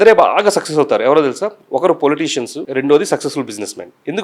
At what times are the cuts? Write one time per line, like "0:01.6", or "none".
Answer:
0:02.6